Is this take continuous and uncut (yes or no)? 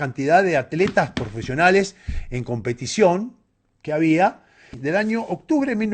no